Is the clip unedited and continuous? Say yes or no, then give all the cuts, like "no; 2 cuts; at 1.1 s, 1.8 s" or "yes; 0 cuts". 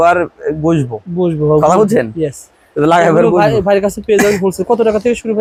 yes; 0 cuts